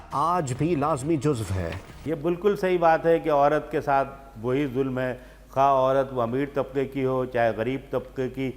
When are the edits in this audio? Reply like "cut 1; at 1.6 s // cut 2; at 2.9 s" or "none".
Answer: none